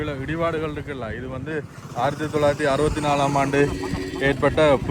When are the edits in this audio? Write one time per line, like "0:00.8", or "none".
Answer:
none